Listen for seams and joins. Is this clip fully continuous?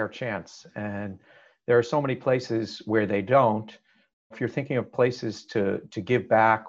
no; 1 cut; at 4.3 s

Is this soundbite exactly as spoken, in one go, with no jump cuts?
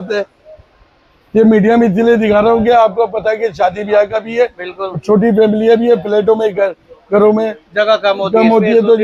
yes; 0 cuts

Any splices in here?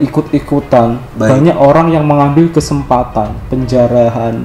no; 0 cuts

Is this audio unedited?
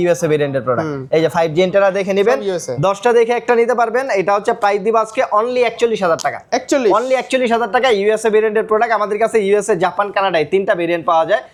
yes; 0 cuts

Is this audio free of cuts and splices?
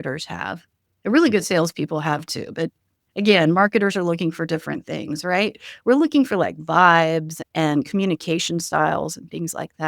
no; 1 cut; at 7.4 s

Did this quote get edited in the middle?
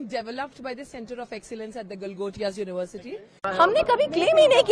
yes; 1 cut; at 3.3 s

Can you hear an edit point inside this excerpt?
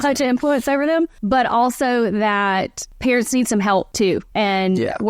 yes; 3 cuts; at 1.2 s, 2.8 s, 4.1 s

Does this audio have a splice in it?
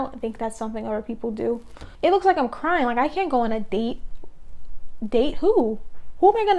yes; 1 cut; at 1.8 s

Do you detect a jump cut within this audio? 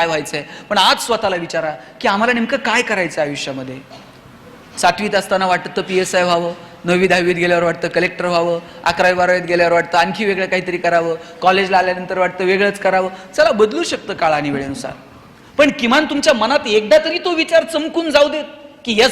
no; 0 cuts

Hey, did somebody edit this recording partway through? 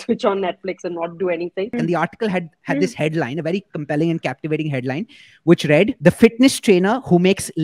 yes; 2 cuts; at 1.7 s, 5.9 s

